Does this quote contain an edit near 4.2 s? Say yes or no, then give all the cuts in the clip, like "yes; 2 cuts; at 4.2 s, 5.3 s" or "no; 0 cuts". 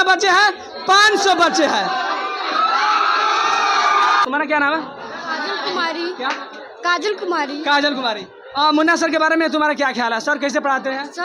yes; 1 cut; at 4.2 s